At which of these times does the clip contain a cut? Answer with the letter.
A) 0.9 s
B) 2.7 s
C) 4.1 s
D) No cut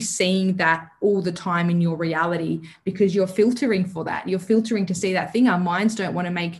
D